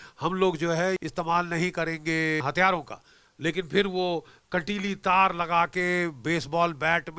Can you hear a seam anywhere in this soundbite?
yes; 2 cuts; at 1.0 s, 2.4 s

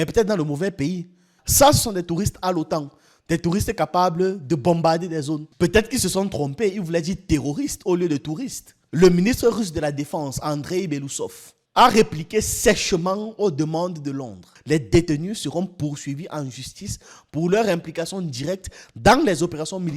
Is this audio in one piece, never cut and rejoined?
no; 2 cuts; at 1.4 s, 14.4 s

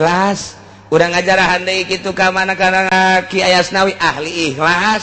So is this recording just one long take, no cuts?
no; 1 cut; at 2.9 s

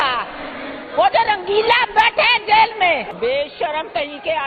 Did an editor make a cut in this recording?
yes; 1 cut; at 3.1 s

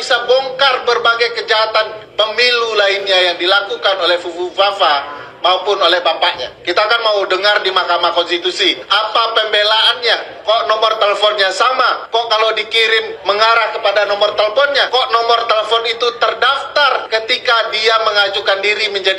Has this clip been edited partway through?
yes; 7 cuts; at 6.5 s, 8.8 s, 10.3 s, 12.0 s, 13.1 s, 14.9 s, 17.0 s

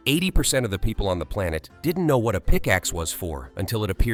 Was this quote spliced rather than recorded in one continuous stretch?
no; 0 cuts

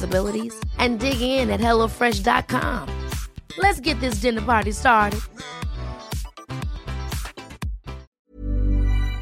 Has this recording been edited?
yes; 1 cut; at 8.1 s

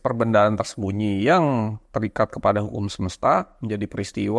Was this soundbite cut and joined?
no; 0 cuts

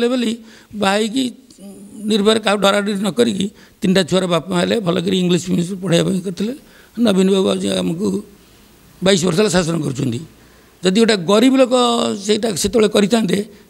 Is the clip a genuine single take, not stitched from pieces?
yes; 0 cuts

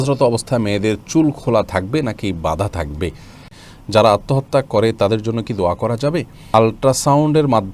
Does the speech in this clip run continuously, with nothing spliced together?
no; 2 cuts; at 3.6 s, 6.5 s

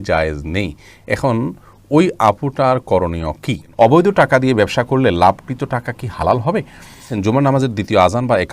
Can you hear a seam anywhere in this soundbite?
yes; 2 cuts; at 3.6 s, 7.1 s

